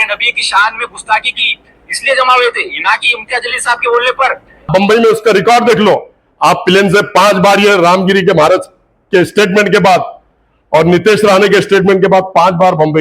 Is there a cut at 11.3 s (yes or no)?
no